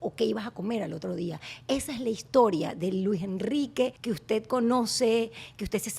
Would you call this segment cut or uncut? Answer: cut